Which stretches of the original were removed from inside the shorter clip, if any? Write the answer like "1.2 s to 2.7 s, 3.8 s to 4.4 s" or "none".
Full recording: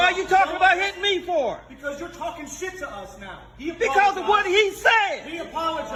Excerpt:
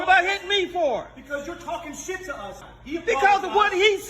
3.2 s to 3.4 s